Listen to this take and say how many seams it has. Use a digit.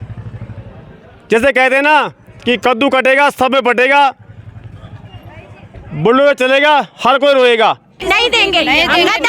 1